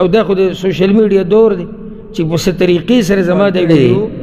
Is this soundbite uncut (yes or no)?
yes